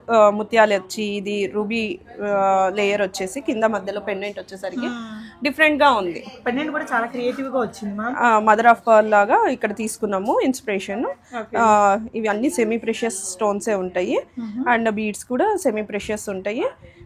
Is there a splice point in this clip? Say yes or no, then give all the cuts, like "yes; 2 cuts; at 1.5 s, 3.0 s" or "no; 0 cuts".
no; 0 cuts